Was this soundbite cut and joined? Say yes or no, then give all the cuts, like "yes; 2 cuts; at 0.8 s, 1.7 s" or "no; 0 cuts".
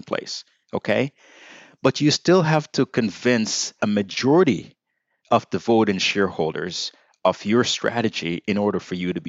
yes; 1 cut; at 3.7 s